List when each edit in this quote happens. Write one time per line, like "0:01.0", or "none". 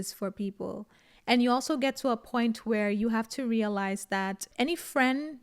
0:04.5